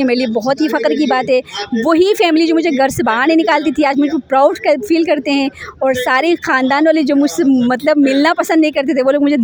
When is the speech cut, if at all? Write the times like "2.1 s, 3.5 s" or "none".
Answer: none